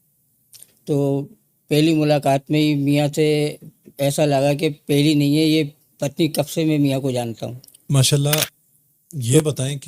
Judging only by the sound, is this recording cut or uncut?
cut